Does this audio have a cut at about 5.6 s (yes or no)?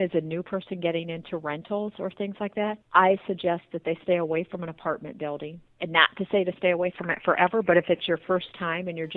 yes